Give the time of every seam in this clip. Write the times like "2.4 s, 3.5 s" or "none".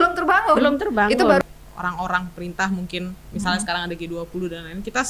1.4 s